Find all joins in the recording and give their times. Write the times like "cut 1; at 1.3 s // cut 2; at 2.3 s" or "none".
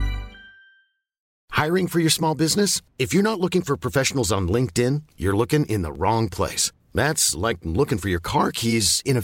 cut 1; at 1.4 s